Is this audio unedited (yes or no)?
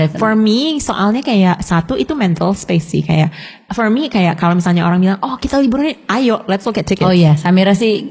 yes